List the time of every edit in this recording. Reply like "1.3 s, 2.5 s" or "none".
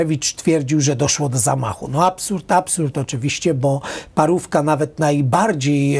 none